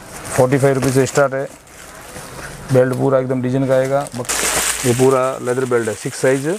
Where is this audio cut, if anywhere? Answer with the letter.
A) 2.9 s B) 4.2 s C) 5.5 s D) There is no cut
B